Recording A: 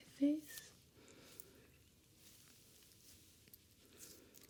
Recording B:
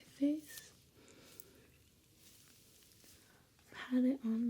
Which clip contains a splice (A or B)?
B